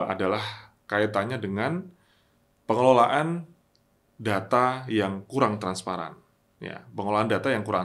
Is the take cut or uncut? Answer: uncut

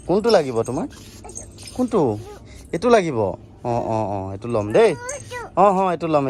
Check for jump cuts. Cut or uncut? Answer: uncut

